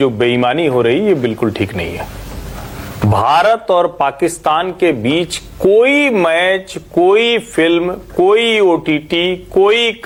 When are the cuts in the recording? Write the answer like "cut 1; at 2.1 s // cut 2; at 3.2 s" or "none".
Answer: none

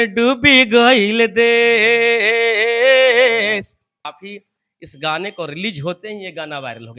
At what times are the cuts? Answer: cut 1; at 4.1 s

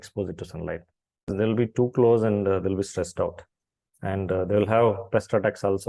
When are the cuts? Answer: cut 1; at 1.3 s

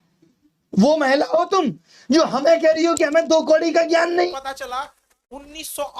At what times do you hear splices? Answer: cut 1; at 4.3 s

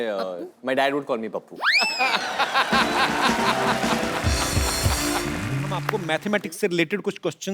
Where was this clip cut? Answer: cut 1; at 5.8 s

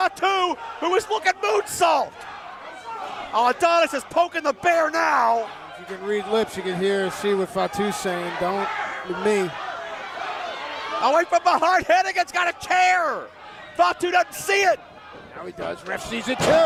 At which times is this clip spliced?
none

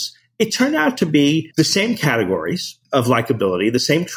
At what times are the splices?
cut 1; at 1.5 s // cut 2; at 2.7 s

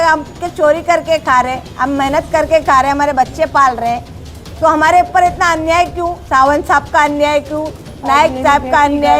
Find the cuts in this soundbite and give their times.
none

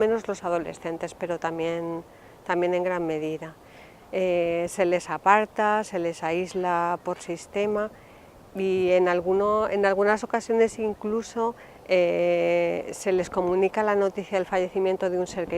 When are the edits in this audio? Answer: cut 1; at 1.3 s

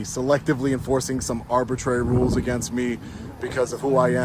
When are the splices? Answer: none

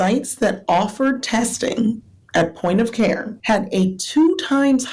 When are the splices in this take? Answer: cut 1; at 3.3 s

